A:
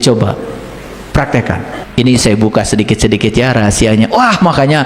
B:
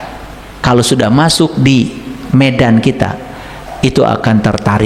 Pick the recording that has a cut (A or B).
A